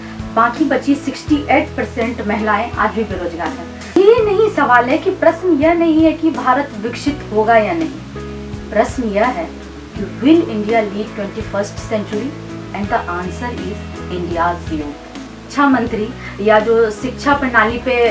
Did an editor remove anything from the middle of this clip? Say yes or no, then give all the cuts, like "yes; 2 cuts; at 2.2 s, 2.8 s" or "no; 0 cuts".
yes; 2 cuts; at 4.0 s, 15.4 s